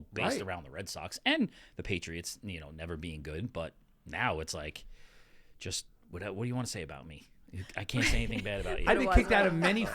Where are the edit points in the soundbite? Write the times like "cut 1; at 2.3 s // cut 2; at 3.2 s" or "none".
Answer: cut 1; at 8.8 s